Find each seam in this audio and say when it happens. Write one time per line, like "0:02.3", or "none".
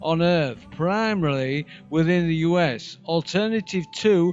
0:01.1